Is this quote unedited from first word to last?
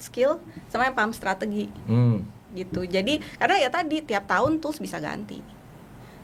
yes; 0 cuts

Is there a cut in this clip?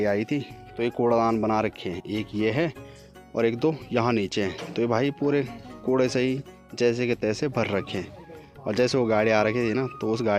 no; 0 cuts

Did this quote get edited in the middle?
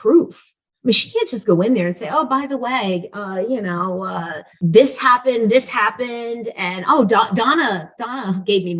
yes; 1 cut; at 4.4 s

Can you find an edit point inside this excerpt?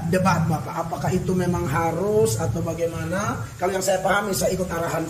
no; 0 cuts

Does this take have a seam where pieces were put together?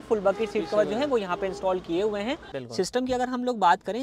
yes; 1 cut; at 2.6 s

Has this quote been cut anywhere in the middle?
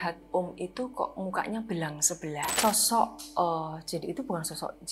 yes; 1 cut; at 2.5 s

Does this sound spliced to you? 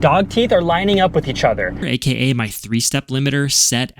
yes; 1 cut; at 1.8 s

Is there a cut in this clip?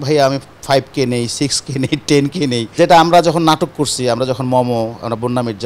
yes; 1 cut; at 2.6 s

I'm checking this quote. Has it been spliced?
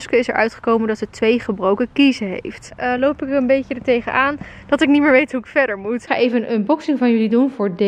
yes; 2 cuts; at 2.7 s, 6.0 s

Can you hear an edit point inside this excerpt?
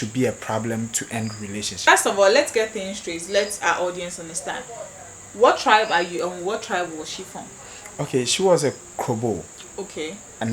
yes; 1 cut; at 1.9 s

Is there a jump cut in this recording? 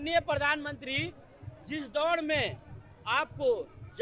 no; 0 cuts

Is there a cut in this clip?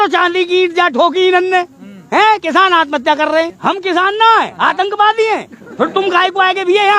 yes; 1 cut; at 3.5 s

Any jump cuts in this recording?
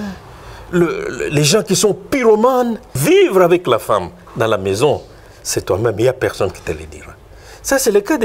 yes; 1 cut; at 2.9 s

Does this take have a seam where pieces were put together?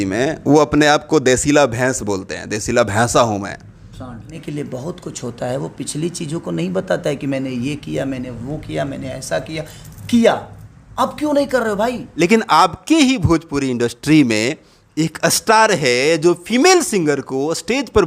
yes; 2 cuts; at 4.4 s, 12.2 s

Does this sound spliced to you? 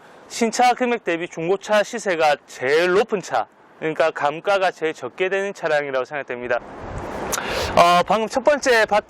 yes; 1 cut; at 6.8 s

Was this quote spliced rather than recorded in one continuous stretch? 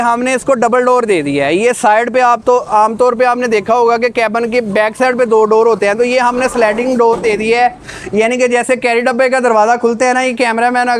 no; 0 cuts

